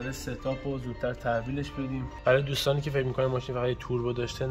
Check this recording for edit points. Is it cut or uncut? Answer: uncut